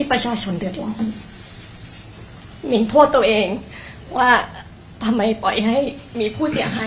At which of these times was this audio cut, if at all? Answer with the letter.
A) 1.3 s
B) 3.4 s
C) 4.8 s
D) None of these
D